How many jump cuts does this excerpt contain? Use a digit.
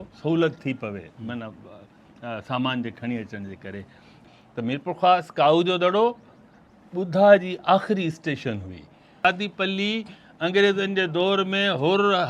2